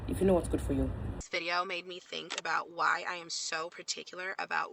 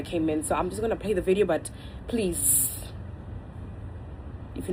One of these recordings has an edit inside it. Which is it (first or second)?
first